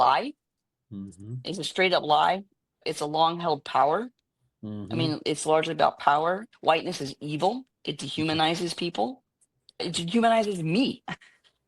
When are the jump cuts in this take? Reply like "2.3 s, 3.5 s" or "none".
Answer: 2.8 s, 6.5 s, 9.8 s